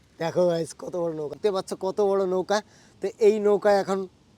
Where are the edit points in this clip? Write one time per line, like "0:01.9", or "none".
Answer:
0:01.3